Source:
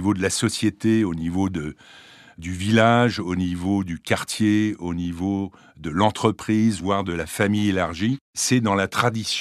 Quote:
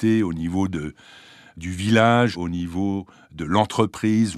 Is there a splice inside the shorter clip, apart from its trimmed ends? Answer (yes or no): yes